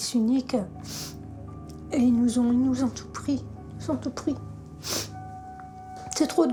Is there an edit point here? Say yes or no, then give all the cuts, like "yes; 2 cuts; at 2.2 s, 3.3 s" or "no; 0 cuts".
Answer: no; 0 cuts